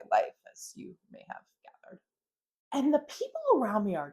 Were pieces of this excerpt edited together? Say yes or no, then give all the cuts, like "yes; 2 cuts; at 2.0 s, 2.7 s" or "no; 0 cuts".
yes; 1 cut; at 2.8 s